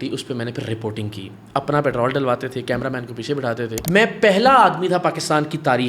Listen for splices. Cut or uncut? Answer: cut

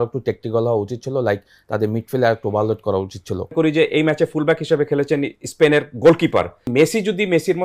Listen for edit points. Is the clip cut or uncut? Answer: cut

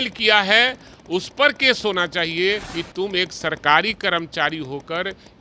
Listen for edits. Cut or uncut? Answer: cut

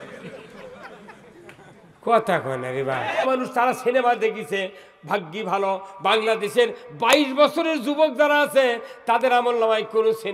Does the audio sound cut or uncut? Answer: cut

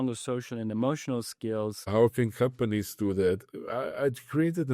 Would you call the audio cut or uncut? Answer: cut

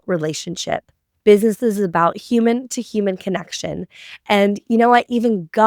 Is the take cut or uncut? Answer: uncut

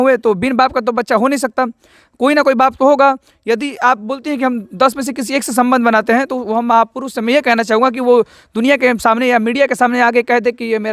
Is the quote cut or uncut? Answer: uncut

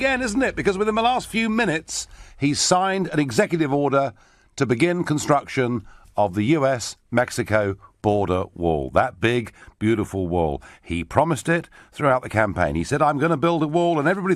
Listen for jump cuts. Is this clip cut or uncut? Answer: uncut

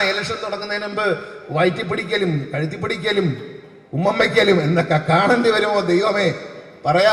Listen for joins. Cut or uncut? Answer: uncut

